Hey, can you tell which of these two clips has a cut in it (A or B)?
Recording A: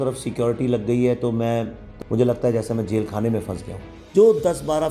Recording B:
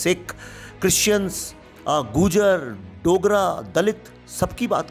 A